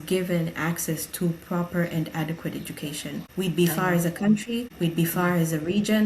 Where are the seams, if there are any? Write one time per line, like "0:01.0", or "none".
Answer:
0:03.3
0:04.7